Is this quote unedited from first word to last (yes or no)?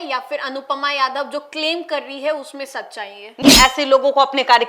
no